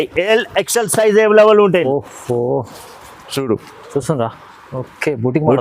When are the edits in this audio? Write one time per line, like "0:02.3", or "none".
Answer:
0:01.8